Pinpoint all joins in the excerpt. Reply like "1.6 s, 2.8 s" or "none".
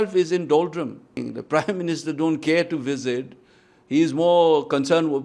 1.2 s